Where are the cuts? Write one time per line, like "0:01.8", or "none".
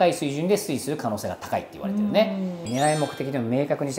0:02.6